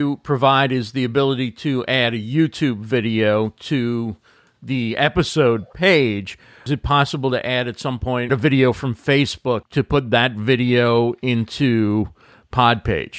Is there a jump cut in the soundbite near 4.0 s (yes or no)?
no